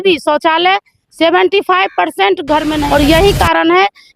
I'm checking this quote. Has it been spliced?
yes; 1 cut; at 2.8 s

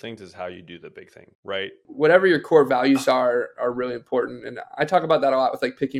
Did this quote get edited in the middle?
yes; 1 cut; at 1.8 s

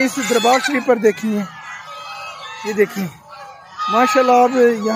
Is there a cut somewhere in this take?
no; 0 cuts

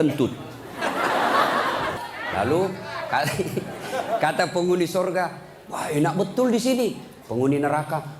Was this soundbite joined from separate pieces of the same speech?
yes; 1 cut; at 2.0 s

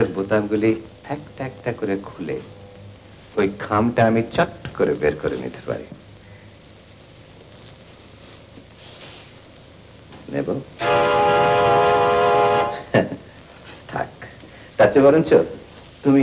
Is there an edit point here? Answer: no; 0 cuts

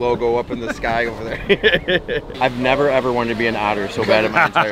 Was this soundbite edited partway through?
yes; 1 cut; at 2.2 s

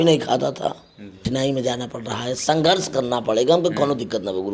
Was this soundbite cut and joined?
yes; 1 cut; at 1.3 s

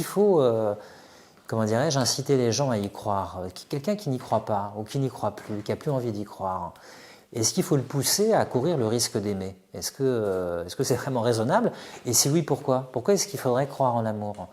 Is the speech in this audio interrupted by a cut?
no; 0 cuts

